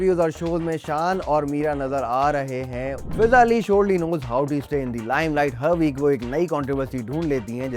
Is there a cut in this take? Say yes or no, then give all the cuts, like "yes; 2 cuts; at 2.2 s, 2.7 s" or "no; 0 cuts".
yes; 1 cut; at 3.1 s